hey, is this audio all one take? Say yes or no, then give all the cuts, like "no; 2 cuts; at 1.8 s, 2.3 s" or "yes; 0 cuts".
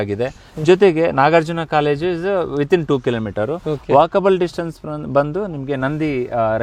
yes; 0 cuts